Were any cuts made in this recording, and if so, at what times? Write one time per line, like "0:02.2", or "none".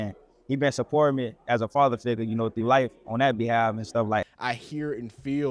0:04.2